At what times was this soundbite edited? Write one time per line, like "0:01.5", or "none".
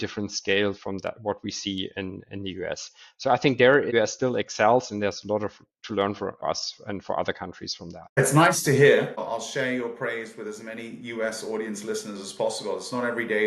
0:09.2